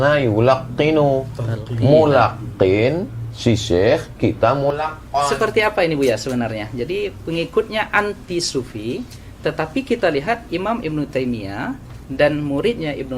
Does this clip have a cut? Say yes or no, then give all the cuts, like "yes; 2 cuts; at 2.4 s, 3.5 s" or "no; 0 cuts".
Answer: yes; 1 cut; at 4.7 s